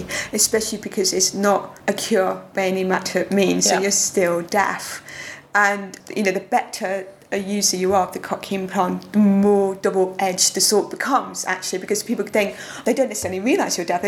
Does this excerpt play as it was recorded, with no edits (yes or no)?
no